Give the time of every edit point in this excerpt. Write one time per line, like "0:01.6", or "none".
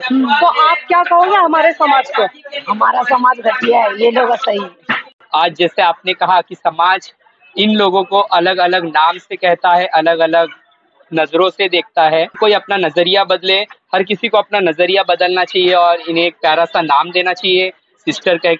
0:05.1
0:12.3